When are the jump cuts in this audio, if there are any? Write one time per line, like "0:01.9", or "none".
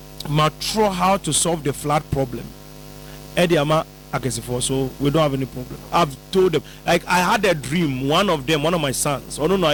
none